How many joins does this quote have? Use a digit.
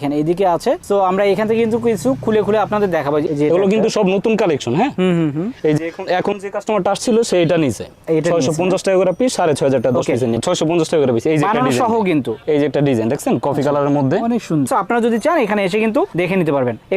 3